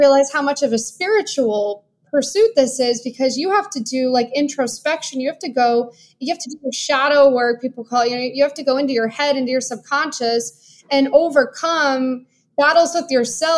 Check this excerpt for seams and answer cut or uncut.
uncut